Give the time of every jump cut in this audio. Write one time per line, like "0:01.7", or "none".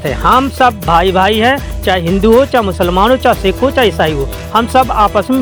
none